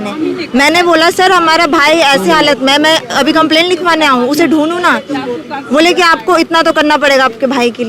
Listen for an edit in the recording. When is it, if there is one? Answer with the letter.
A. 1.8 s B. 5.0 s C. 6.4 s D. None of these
D